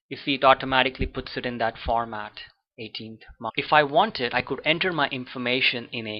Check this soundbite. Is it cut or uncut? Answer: uncut